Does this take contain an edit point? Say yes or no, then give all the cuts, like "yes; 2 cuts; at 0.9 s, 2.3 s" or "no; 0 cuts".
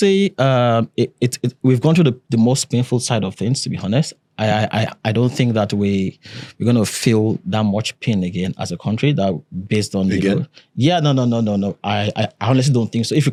no; 0 cuts